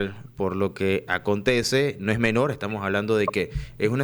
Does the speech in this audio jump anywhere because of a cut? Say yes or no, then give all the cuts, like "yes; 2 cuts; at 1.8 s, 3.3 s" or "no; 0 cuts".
no; 0 cuts